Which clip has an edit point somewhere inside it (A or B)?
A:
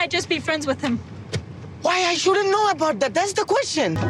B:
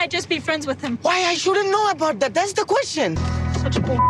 B